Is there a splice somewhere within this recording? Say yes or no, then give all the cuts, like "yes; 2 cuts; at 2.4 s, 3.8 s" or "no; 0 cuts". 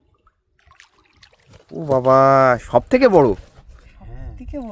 no; 0 cuts